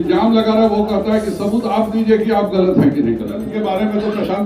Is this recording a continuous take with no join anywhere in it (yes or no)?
no